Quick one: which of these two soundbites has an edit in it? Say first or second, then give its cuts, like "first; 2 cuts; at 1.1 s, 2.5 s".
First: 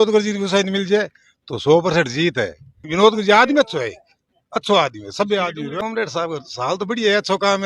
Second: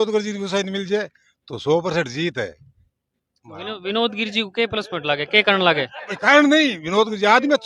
first; 2 cuts; at 2.9 s, 5.7 s